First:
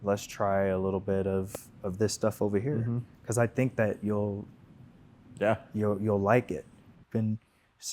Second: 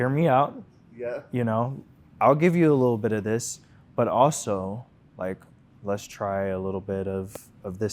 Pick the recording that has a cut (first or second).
first